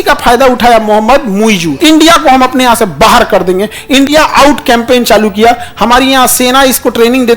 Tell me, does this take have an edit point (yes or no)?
yes